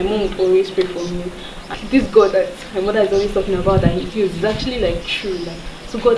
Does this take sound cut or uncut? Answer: cut